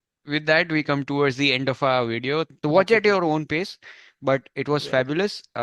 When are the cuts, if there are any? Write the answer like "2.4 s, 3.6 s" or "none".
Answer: 2.5 s